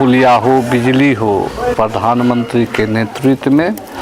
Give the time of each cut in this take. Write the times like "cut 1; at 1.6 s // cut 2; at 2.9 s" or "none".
cut 1; at 1.7 s